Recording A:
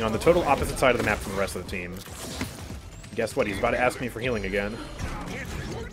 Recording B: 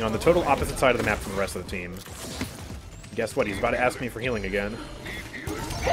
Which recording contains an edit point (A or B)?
A